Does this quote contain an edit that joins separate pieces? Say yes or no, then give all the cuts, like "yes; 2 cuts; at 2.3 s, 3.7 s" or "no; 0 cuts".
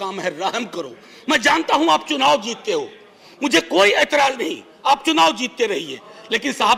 no; 0 cuts